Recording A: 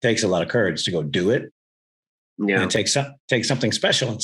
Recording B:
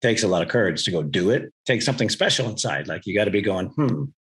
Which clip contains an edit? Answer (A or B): B